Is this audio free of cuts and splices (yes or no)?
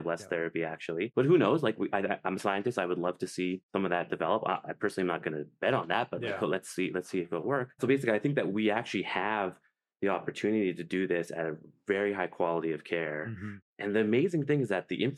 yes